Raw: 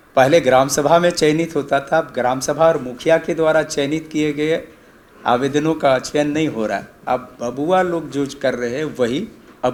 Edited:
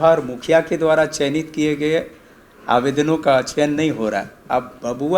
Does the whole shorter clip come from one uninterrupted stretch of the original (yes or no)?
yes